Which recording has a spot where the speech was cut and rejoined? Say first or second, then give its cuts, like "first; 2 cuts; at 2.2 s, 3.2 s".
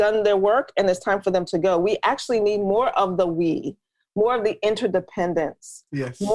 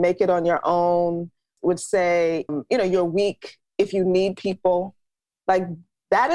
second; 2 cuts; at 1.5 s, 2.5 s